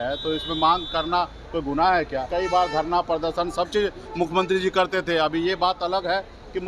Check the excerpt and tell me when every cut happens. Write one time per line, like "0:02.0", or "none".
0:02.3